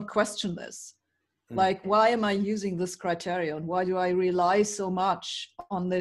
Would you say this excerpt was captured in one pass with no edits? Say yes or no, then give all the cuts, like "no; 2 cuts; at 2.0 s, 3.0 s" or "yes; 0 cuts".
no; 1 cut; at 1.8 s